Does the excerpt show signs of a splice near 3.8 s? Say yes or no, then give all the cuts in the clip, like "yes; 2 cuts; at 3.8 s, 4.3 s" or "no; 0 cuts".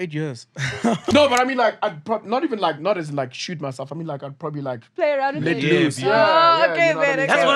no; 1 cut; at 1.0 s